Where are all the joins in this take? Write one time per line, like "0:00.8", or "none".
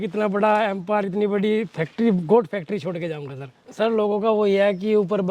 0:03.6